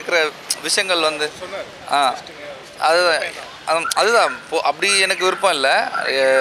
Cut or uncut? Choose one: uncut